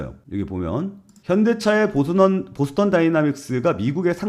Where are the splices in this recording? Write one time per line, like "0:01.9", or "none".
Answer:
none